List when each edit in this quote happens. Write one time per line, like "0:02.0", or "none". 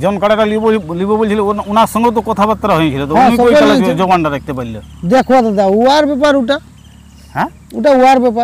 none